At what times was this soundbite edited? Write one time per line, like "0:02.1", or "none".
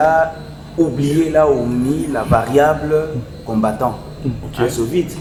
none